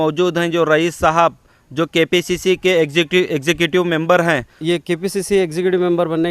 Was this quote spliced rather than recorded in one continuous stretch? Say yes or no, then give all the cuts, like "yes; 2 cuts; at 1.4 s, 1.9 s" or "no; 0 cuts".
yes; 1 cut; at 4.5 s